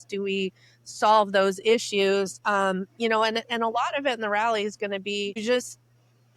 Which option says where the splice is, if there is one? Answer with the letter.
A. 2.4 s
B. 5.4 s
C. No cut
B